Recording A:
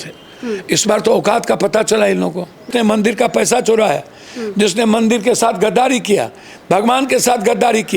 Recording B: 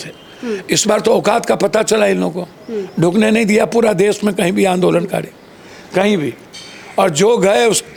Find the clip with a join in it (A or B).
A